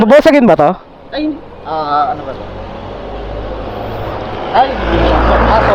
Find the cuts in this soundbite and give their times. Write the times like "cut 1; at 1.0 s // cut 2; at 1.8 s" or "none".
none